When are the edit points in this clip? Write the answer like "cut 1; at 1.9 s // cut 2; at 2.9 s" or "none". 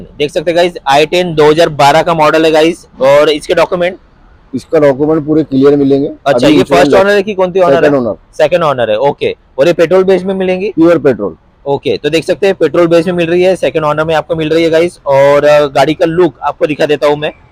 none

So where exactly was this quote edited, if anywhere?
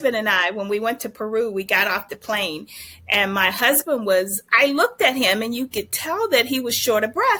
none

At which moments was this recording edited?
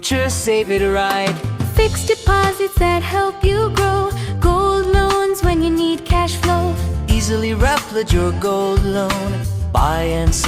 none

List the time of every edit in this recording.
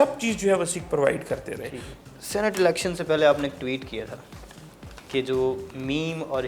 cut 1; at 1.9 s

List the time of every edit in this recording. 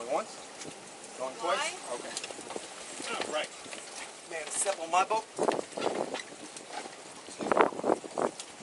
none

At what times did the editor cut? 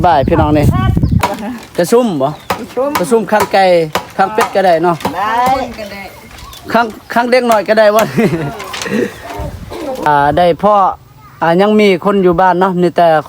cut 1; at 1.2 s // cut 2; at 10.1 s

